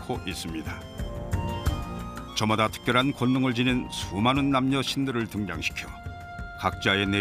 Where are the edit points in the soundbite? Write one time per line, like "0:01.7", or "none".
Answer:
0:04.3